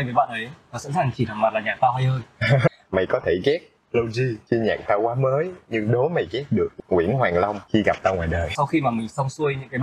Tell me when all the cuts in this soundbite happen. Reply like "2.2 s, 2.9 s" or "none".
2.7 s, 4.4 s, 6.7 s, 7.6 s, 8.5 s

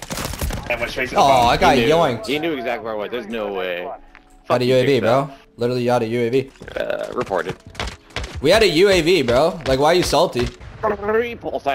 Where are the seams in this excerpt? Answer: 6.6 s, 10.6 s

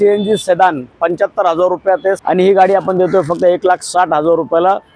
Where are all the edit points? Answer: 2.2 s

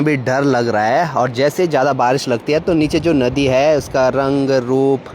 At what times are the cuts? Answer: none

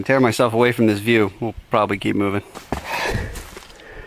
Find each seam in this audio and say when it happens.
2.6 s

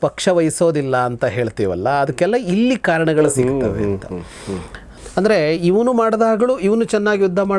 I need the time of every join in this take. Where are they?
4.8 s

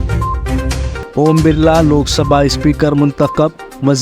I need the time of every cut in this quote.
0.9 s

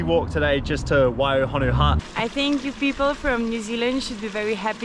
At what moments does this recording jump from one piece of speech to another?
2.0 s

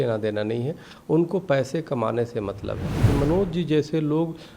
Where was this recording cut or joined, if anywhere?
3.0 s

